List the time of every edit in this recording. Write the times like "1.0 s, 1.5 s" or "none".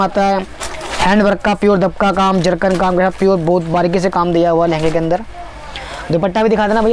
none